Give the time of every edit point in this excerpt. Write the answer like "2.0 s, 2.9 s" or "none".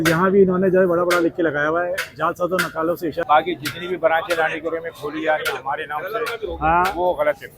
3.2 s